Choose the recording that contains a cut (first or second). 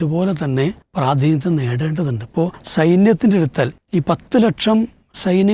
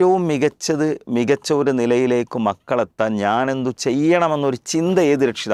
first